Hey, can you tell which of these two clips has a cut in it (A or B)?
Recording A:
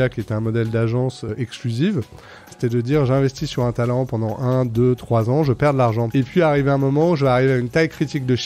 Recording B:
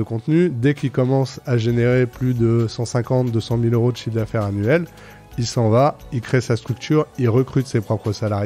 A